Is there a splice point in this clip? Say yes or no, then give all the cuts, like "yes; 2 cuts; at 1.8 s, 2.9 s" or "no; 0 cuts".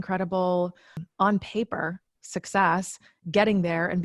yes; 1 cut; at 1.0 s